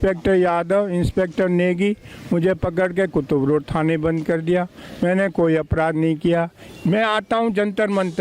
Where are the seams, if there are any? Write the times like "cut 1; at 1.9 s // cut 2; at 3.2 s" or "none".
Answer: cut 1; at 6.6 s